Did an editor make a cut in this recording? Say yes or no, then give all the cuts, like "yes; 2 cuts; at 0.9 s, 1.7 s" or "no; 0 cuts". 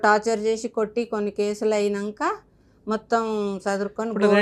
no; 0 cuts